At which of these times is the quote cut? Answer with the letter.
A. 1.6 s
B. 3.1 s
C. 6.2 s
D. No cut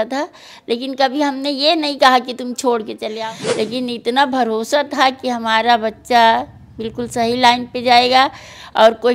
B